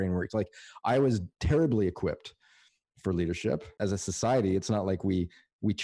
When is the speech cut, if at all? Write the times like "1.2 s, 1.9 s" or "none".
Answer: 3.8 s

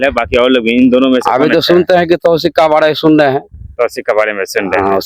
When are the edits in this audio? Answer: none

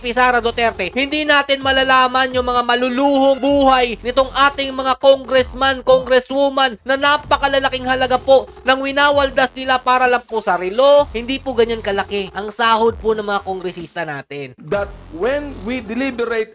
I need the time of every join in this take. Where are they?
11.1 s, 14.5 s

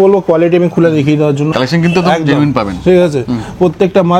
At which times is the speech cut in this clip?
1.5 s

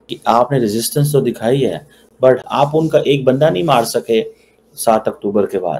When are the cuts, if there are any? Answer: 2.3 s

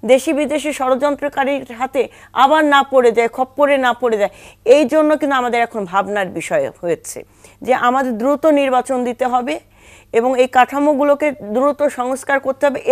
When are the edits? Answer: none

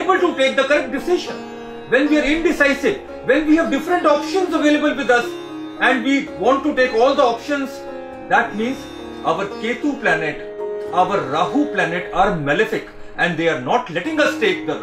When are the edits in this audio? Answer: none

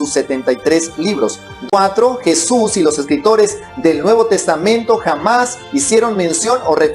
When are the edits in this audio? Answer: 1.5 s

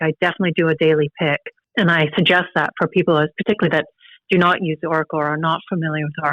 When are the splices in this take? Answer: 1.6 s

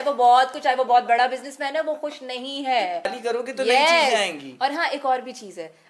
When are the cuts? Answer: 3.2 s

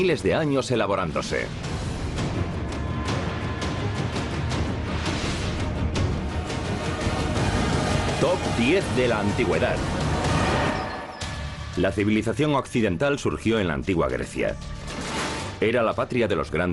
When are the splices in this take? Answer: 12.4 s

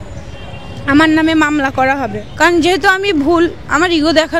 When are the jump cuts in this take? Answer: 2.2 s

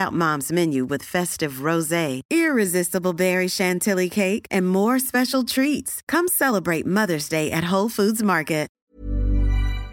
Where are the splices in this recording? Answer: 8.8 s

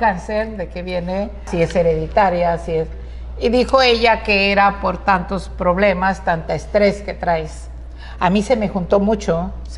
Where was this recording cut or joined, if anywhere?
1.5 s

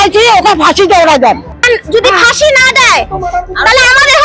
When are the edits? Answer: 1.6 s

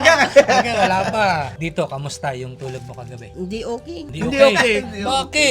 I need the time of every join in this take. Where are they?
1.6 s, 3.2 s, 4.1 s

